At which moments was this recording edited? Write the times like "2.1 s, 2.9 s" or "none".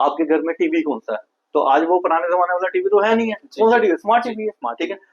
none